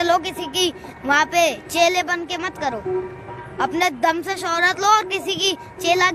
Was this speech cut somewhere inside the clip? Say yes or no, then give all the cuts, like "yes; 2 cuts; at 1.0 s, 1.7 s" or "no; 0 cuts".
no; 0 cuts